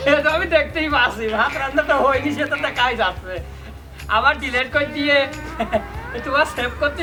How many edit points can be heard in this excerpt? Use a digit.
0